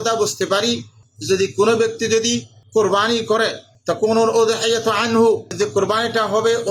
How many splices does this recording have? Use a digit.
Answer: 1